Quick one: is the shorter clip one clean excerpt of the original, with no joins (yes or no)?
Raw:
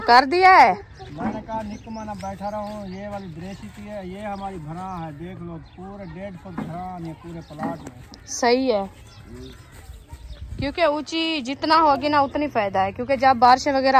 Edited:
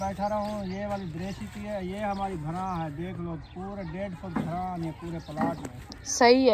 yes